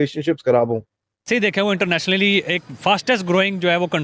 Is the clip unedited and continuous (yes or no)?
no